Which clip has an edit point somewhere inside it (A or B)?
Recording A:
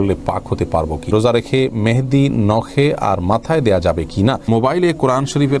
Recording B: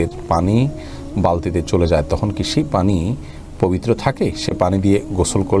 A